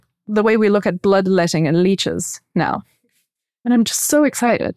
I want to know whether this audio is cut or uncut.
cut